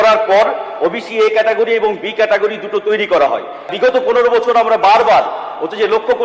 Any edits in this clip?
yes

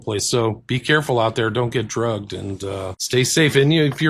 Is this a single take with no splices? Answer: no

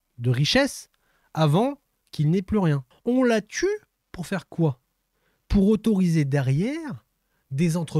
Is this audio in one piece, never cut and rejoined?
no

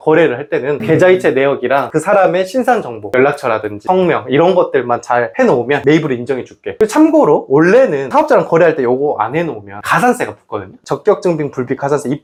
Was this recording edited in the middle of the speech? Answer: no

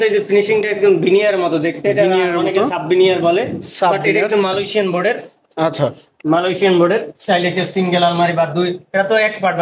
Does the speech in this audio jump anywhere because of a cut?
no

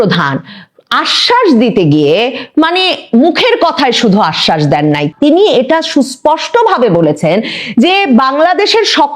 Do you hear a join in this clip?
yes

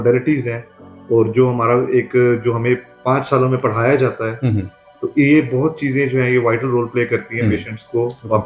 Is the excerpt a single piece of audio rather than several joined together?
yes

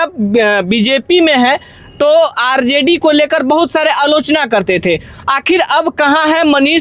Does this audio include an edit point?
no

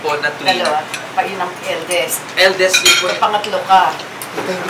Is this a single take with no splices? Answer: yes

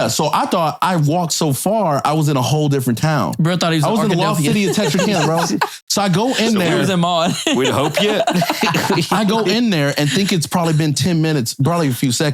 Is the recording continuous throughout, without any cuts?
yes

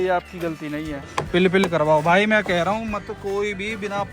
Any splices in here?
yes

